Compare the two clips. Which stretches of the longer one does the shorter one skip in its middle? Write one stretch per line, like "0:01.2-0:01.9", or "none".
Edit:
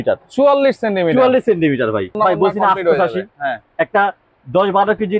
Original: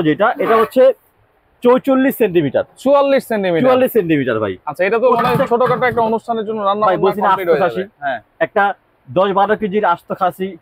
0:04.6-0:06.8